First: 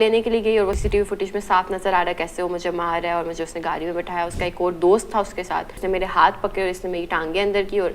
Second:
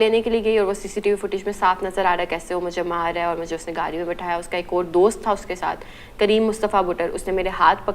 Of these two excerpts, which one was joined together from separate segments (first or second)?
first